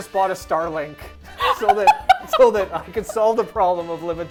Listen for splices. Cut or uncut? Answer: uncut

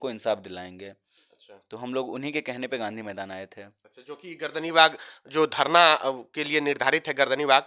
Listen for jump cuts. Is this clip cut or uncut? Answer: uncut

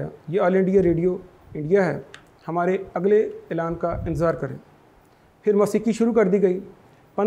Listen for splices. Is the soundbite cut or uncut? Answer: uncut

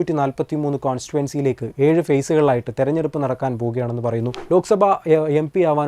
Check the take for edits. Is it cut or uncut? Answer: cut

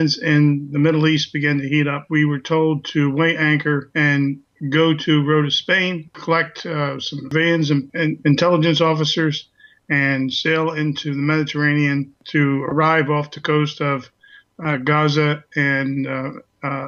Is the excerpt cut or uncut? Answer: uncut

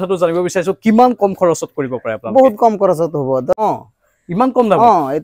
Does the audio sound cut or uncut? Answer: cut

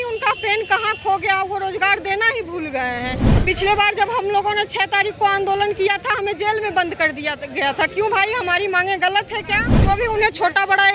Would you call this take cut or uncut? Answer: cut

